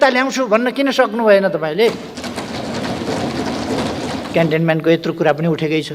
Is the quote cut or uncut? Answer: cut